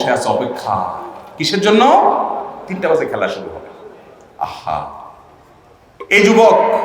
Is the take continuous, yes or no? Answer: yes